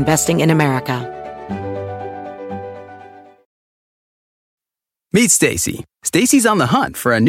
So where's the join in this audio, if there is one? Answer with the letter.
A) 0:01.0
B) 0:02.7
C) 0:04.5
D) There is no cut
A